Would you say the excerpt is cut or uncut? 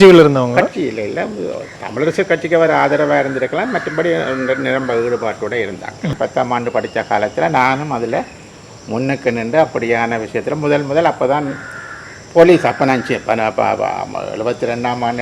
cut